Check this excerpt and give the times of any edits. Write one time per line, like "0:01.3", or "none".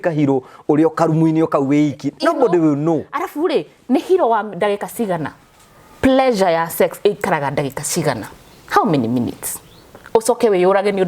none

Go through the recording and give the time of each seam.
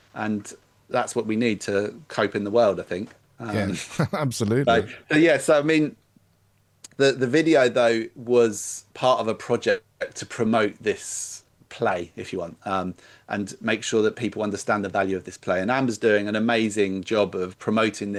none

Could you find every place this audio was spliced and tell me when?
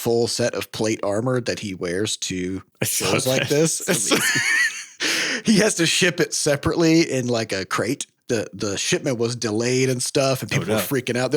0:02.7
0:08.1

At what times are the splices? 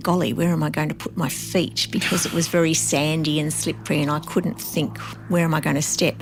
none

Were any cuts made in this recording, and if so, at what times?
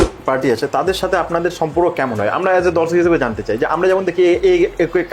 none

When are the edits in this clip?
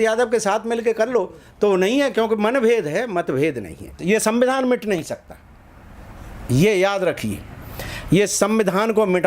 0:03.9

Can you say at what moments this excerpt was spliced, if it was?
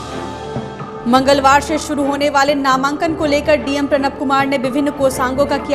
0:00.9

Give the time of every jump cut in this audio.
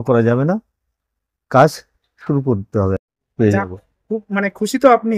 0:03.2

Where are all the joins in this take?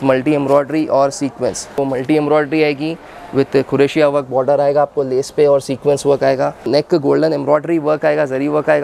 0:01.7
0:06.6

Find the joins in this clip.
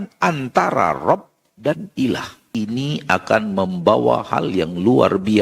0:02.4

